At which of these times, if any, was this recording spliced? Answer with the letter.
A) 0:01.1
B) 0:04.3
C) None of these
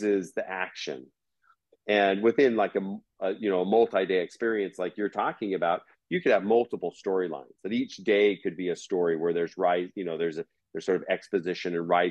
A